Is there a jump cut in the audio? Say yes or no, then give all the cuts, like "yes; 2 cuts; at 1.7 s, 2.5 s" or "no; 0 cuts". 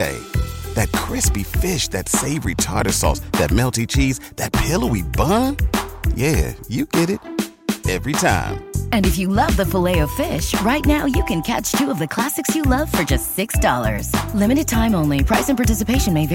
no; 0 cuts